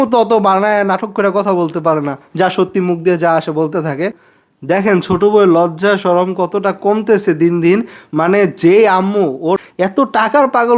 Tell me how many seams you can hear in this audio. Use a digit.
2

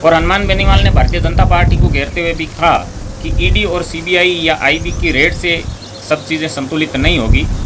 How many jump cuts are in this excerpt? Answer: 0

